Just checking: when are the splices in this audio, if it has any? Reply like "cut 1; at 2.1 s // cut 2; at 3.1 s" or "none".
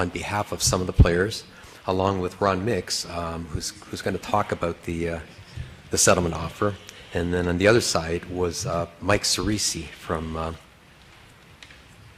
cut 1; at 2.7 s